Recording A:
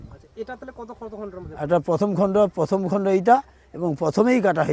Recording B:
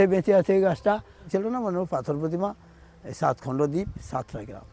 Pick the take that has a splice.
B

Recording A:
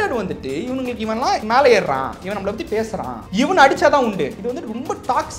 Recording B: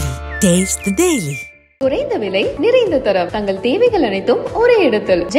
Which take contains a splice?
A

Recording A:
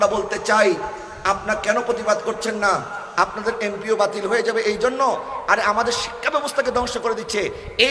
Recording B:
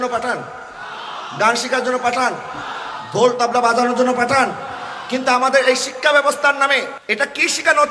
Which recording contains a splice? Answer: B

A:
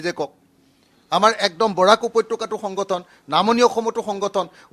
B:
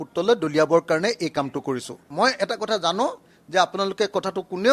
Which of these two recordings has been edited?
B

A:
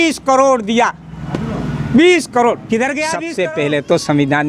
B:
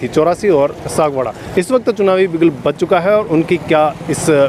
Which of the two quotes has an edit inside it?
A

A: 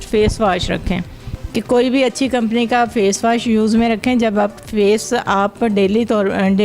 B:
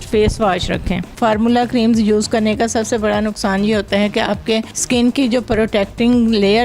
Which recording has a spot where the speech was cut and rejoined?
B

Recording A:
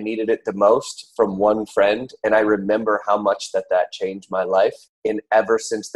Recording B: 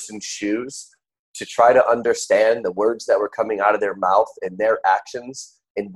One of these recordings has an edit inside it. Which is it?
A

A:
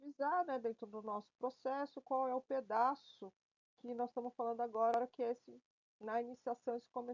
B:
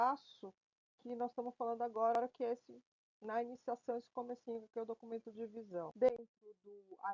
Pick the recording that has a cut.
B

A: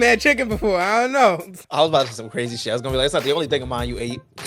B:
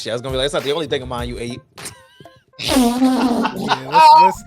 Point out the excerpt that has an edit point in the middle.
A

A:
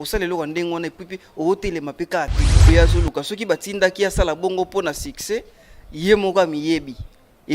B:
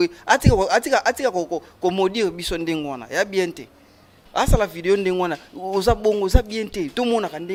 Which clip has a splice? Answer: A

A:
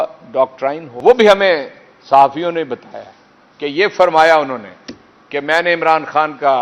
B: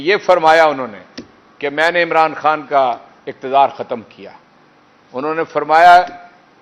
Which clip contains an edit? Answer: A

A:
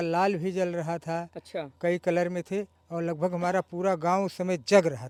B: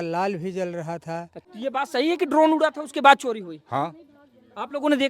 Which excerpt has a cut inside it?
B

